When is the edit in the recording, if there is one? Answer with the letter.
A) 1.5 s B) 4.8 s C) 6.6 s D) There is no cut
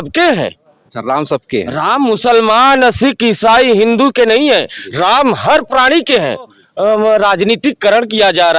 C